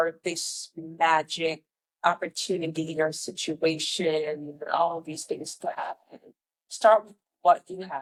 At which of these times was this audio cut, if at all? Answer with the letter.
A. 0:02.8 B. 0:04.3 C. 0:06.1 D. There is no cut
D